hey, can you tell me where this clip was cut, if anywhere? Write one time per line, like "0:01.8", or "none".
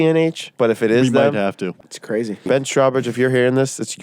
0:01.9